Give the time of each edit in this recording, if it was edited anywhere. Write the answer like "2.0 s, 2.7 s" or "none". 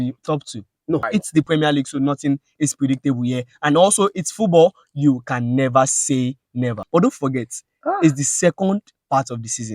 1.1 s, 6.7 s